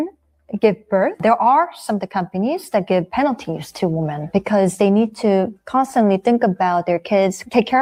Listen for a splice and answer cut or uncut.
uncut